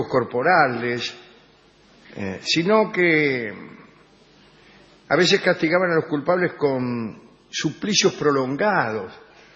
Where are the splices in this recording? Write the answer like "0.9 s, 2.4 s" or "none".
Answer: 6.5 s

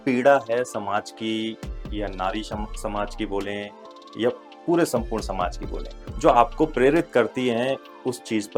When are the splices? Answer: none

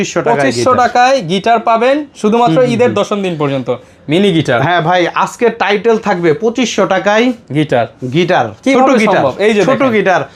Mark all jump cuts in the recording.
none

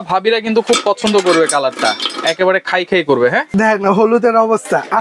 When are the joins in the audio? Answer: 3.5 s

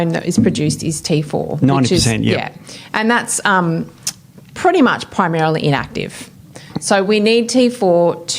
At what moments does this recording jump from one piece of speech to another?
none

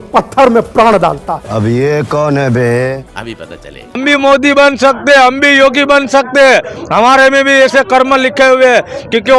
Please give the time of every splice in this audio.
4.0 s

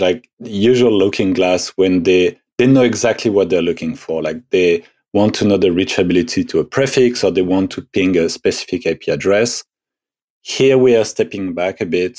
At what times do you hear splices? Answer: none

